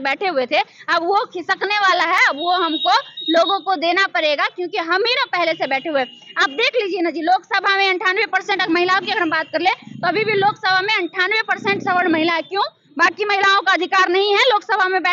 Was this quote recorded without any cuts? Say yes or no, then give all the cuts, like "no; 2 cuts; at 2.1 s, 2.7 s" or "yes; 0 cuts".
yes; 0 cuts